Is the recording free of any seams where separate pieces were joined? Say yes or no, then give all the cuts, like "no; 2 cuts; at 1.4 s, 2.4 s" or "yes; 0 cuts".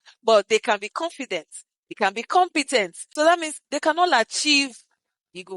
no; 1 cut; at 3.0 s